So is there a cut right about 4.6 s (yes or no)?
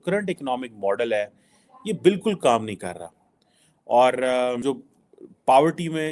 yes